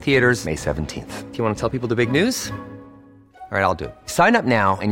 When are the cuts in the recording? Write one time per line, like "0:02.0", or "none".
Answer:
none